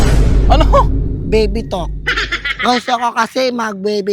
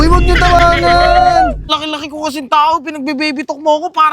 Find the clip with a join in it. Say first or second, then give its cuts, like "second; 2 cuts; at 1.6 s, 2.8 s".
second; 1 cut; at 1.7 s